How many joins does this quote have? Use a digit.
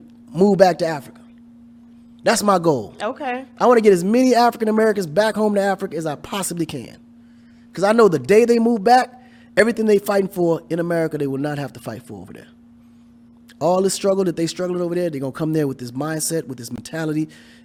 0